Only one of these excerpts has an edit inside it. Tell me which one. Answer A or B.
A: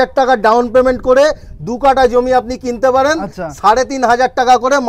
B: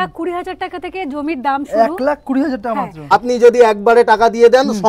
B